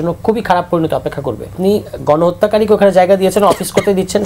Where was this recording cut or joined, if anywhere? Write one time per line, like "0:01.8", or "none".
0:01.5